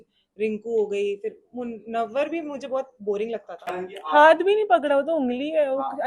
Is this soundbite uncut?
no; 1 cut; at 3.7 s

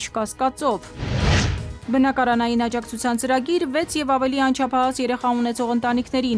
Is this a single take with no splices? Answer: yes; 0 cuts

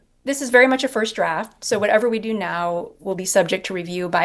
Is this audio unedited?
yes; 0 cuts

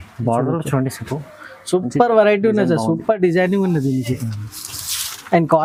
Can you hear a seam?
no; 0 cuts

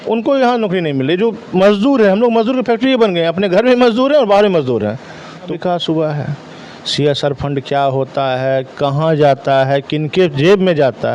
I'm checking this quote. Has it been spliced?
yes; 1 cut; at 5.5 s

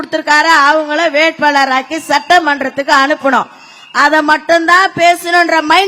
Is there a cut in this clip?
no; 0 cuts

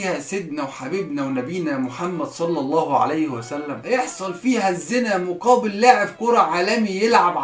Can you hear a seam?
yes; 1 cut; at 3.8 s

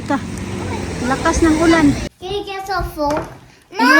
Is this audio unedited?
no; 1 cut; at 2.1 s

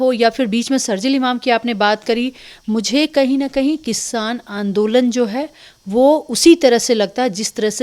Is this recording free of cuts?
yes; 0 cuts

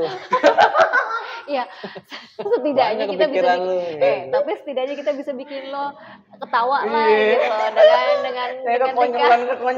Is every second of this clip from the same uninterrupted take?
yes; 0 cuts

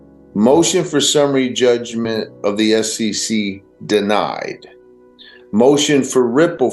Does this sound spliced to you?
no; 0 cuts

